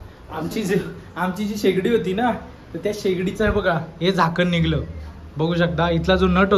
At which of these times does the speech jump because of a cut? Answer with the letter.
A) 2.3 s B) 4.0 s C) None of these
C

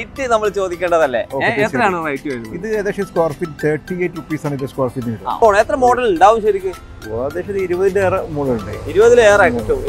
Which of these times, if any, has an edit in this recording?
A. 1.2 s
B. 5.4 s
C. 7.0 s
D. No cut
B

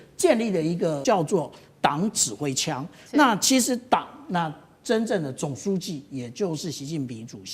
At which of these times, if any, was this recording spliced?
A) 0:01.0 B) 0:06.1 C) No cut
A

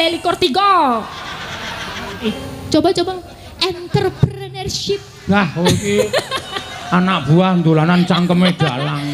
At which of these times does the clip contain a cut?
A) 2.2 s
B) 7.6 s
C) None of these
A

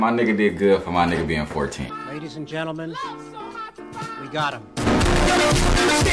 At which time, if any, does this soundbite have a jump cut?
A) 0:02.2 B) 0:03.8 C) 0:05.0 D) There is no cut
D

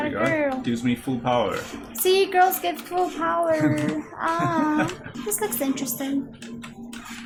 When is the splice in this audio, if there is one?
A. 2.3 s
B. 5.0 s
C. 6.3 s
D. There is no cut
D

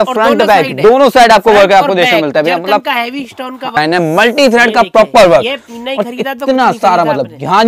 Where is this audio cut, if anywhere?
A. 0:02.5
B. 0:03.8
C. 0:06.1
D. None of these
B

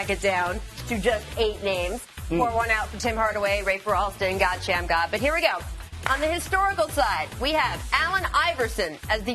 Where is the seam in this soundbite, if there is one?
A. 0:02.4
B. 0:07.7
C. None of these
A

